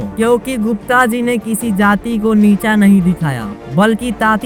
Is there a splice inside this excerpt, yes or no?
no